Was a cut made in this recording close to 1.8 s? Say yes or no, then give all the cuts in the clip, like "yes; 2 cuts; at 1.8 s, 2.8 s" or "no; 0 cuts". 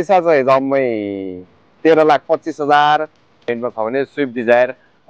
no; 1 cut; at 3.4 s